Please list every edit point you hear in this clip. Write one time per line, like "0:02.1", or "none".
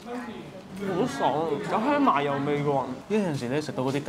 0:03.0